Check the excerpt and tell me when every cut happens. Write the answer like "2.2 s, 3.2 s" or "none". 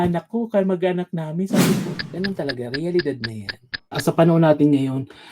1.9 s, 4.0 s

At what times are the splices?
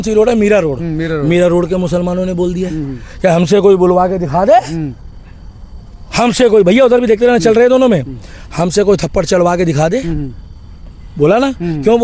none

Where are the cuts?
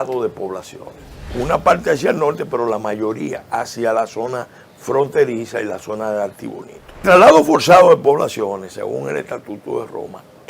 1.3 s, 7.0 s

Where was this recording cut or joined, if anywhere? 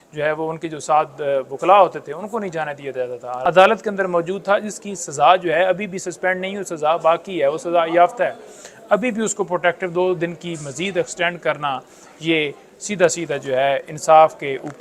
3.4 s

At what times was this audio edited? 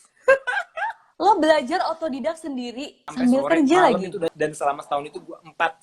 3.0 s, 4.3 s

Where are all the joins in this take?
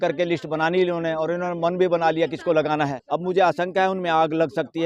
3.0 s

